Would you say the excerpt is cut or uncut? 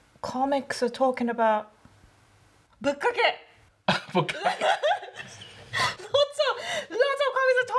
uncut